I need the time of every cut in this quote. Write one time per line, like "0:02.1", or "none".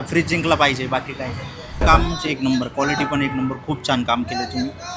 0:01.8